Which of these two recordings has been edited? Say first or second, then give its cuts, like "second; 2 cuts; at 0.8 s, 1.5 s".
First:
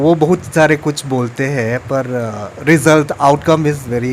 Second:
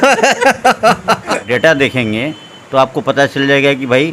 second; 1 cut; at 1.3 s